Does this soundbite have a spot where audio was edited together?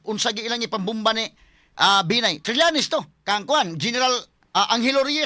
yes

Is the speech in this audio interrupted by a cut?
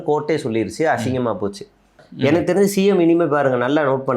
yes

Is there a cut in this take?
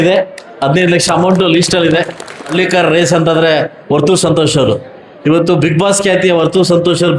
yes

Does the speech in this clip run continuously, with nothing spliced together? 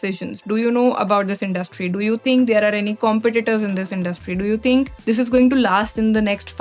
no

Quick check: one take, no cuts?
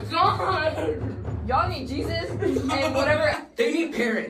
no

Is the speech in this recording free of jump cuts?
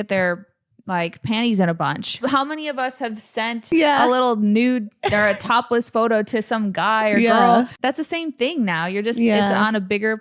no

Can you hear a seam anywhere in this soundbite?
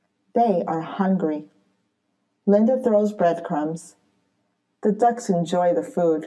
no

